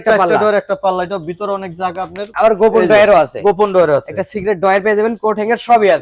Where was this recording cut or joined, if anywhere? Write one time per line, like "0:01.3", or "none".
0:02.3